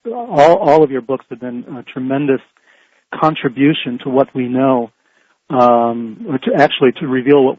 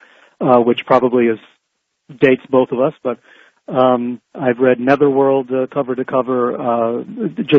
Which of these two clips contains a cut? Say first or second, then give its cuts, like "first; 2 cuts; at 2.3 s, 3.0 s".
second; 1 cut; at 5.0 s